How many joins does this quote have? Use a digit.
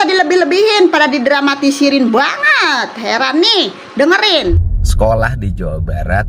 1